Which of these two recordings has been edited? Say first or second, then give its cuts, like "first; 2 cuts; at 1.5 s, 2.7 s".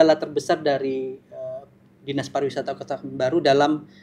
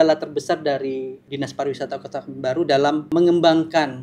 second; 2 cuts; at 1.2 s, 3.1 s